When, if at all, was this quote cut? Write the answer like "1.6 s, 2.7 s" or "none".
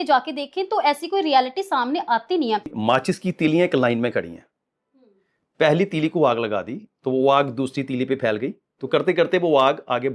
2.7 s